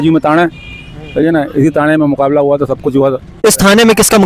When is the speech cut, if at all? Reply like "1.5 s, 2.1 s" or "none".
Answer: 3.3 s